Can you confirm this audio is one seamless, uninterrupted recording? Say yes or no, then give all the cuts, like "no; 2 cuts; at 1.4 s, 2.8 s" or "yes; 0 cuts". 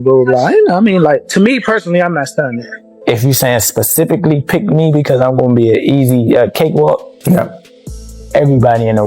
no; 1 cut; at 2.7 s